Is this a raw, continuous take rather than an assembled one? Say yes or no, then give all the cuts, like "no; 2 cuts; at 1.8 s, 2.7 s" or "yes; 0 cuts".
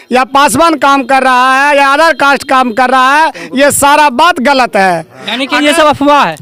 yes; 0 cuts